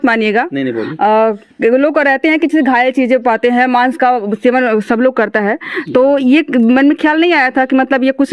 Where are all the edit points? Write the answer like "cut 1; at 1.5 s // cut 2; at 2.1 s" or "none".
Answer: none